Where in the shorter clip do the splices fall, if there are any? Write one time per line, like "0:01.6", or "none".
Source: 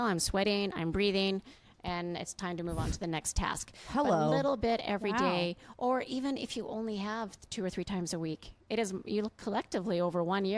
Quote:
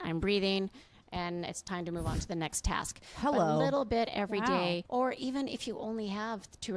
0:04.8